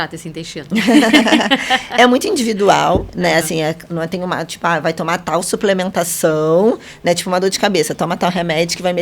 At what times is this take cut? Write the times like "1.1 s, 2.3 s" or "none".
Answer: none